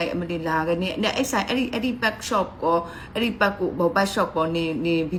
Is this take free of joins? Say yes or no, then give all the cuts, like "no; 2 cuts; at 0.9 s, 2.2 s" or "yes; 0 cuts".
yes; 0 cuts